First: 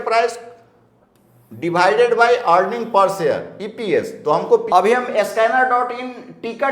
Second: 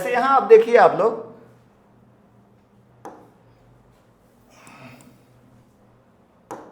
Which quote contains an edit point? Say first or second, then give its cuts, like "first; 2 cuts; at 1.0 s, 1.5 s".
first; 1 cut; at 4.6 s